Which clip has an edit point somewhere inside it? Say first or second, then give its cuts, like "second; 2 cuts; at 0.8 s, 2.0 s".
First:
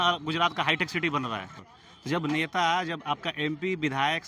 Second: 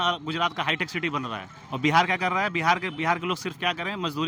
first; 1 cut; at 1.7 s